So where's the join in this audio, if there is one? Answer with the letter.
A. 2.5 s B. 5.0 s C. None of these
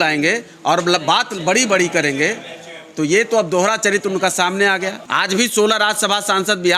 B